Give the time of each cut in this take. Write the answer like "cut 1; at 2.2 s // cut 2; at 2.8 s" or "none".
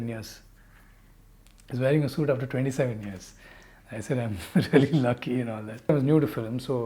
cut 1; at 5.9 s